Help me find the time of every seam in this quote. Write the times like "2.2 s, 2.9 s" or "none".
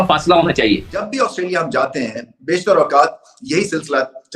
1.1 s